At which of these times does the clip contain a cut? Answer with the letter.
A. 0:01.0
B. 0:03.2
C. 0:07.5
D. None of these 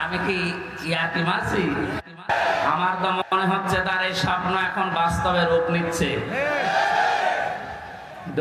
D